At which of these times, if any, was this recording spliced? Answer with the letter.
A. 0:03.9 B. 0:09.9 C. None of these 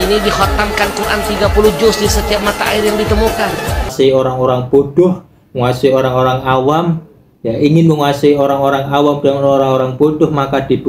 A